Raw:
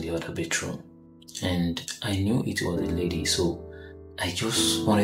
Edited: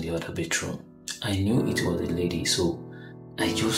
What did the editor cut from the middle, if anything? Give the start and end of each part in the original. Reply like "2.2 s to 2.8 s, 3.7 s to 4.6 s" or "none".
1.1 s to 1.9 s